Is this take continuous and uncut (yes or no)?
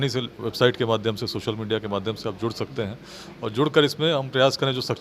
yes